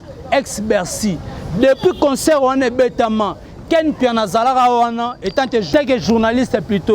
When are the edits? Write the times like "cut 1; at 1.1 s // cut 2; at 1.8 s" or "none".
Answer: cut 1; at 5.7 s